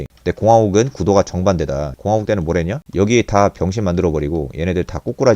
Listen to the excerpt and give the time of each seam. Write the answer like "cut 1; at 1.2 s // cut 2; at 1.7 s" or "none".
cut 1; at 1.9 s